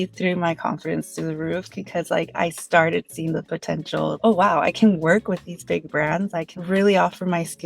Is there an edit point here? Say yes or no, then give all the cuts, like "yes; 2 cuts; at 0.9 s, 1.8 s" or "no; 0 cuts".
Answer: yes; 2 cuts; at 4.2 s, 6.5 s